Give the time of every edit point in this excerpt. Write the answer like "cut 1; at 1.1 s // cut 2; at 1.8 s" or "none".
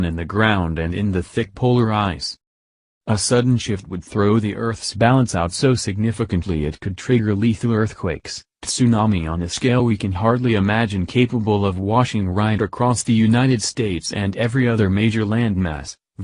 cut 1; at 13.2 s